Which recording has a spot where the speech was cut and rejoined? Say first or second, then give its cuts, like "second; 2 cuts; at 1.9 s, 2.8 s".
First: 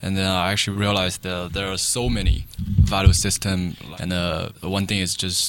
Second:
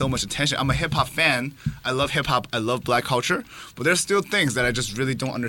first; 3 cuts; at 2.5 s, 3.8 s, 4.5 s